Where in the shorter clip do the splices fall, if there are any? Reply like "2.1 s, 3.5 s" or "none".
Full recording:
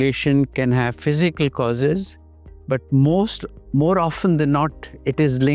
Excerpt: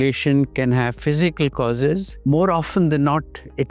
2.1 s